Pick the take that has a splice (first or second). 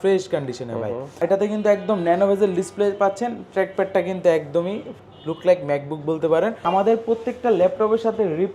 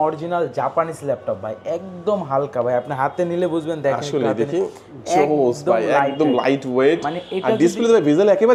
first